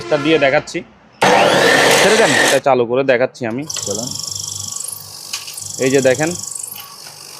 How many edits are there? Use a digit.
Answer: 1